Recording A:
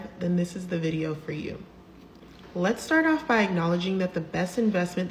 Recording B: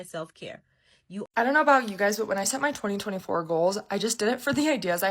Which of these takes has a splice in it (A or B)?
B